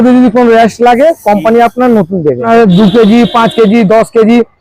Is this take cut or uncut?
cut